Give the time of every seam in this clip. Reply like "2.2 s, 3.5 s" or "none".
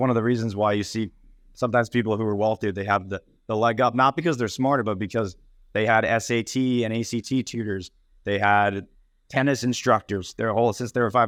none